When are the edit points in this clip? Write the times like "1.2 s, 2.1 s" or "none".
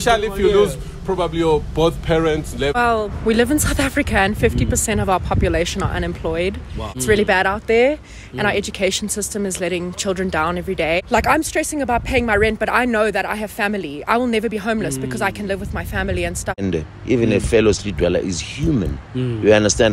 2.8 s, 6.8 s, 11.0 s, 16.6 s